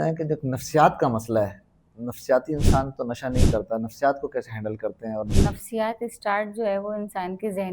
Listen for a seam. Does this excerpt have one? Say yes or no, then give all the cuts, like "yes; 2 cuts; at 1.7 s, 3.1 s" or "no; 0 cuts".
yes; 1 cut; at 5.3 s